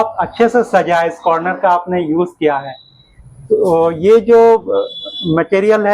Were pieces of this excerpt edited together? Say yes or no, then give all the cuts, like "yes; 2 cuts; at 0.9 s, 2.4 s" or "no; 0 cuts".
no; 0 cuts